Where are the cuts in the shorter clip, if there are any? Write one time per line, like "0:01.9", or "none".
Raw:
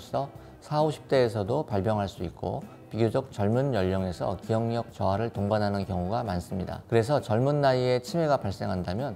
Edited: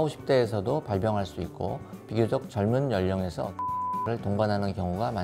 0:03.7